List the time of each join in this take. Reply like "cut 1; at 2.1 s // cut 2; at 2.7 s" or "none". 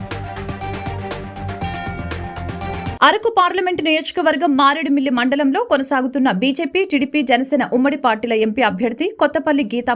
cut 1; at 2.9 s